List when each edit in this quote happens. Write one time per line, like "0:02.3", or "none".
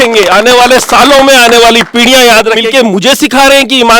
0:02.6